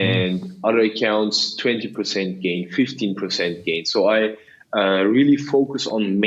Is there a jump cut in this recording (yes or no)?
no